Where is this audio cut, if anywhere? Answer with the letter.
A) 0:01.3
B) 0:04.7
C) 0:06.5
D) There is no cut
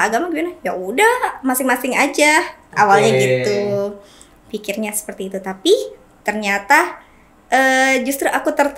D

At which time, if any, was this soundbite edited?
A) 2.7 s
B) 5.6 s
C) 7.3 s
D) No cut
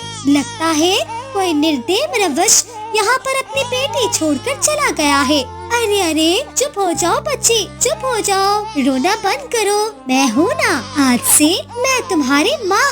B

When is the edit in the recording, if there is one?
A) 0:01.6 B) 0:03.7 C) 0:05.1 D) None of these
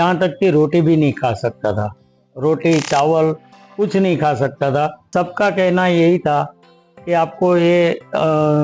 C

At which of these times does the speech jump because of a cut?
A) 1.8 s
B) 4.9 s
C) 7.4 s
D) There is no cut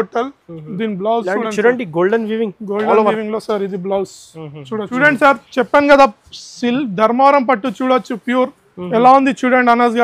B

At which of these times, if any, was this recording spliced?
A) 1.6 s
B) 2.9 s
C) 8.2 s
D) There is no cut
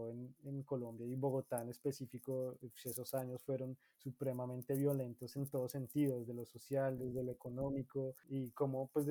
C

